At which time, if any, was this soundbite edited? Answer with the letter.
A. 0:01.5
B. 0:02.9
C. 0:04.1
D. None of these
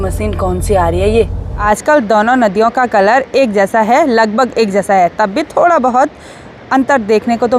A